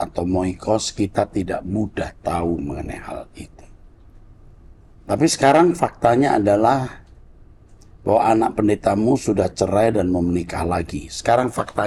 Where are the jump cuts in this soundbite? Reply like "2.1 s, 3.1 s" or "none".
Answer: none